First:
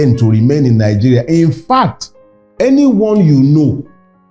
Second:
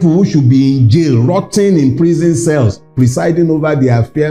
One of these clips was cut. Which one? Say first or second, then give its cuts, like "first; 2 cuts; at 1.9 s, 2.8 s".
first; 1 cut; at 2.4 s